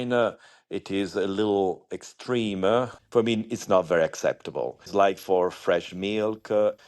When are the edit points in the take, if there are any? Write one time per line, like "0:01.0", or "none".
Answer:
0:04.8